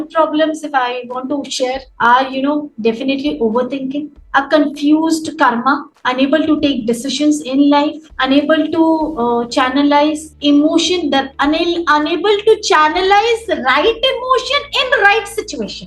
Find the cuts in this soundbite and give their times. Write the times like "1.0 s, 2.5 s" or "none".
1.9 s